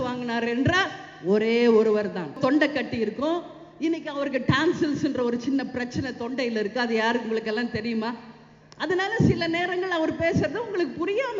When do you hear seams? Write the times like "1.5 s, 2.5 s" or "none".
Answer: 2.4 s